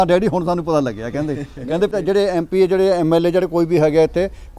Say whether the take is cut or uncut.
cut